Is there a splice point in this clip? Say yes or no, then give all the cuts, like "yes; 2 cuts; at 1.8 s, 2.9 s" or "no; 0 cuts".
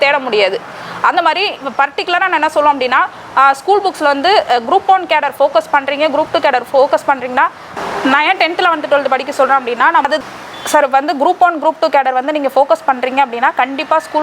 yes; 2 cuts; at 7.7 s, 10.0 s